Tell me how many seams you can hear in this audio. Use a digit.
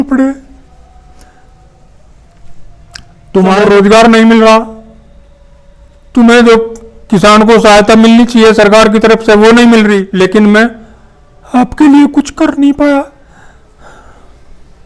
2